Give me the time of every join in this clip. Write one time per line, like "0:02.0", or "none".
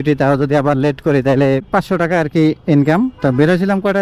0:01.7